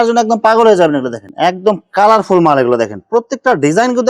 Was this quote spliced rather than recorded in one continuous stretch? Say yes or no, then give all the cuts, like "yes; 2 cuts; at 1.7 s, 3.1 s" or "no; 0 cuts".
yes; 1 cut; at 1.3 s